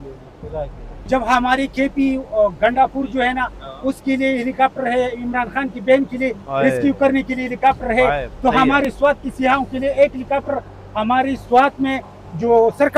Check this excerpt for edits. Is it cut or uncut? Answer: cut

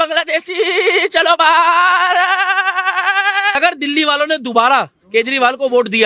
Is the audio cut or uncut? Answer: cut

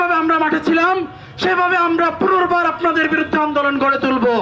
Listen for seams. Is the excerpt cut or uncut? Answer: uncut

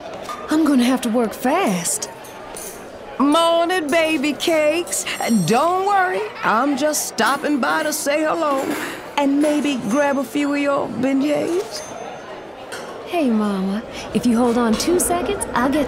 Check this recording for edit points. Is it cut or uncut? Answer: uncut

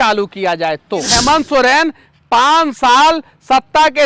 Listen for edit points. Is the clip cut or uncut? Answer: cut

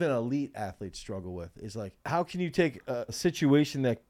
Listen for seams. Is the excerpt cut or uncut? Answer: cut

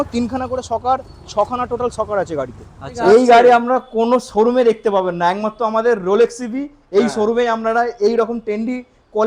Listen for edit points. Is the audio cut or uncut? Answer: cut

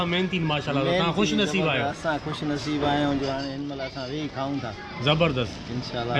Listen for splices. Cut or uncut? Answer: uncut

